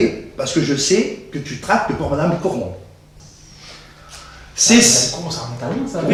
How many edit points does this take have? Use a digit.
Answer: 0